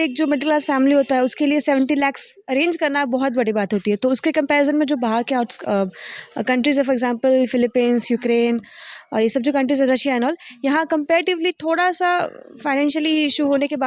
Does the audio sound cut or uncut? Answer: uncut